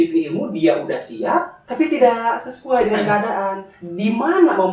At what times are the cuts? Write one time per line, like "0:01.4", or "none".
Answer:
0:01.6